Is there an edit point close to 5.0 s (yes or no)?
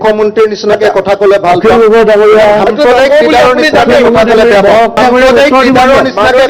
yes